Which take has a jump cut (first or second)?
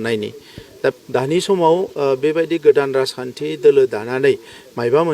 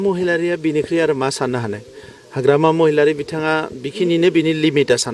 first